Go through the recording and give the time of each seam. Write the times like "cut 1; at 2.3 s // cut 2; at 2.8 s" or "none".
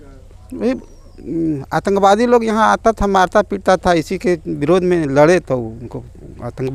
none